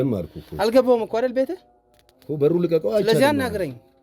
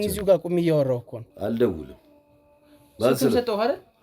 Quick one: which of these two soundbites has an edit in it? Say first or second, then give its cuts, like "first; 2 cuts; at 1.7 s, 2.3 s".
second; 1 cut; at 1.1 s